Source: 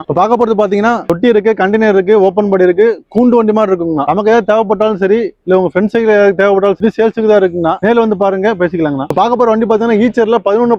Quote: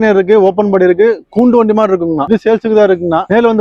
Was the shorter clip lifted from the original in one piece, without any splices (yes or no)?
no